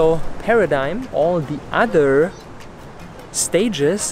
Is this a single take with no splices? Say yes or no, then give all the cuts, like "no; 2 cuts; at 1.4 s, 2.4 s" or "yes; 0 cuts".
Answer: no; 1 cut; at 1.1 s